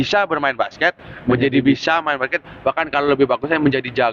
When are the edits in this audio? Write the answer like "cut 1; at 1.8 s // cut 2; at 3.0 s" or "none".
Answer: none

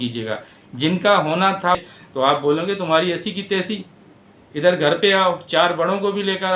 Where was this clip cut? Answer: cut 1; at 1.8 s

